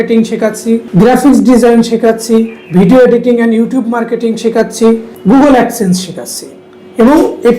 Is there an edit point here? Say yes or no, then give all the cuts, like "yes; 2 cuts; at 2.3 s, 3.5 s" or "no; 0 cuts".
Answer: no; 0 cuts